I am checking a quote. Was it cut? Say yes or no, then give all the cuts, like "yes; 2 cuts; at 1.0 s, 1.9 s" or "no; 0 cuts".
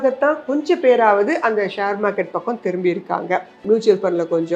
yes; 1 cut; at 3.6 s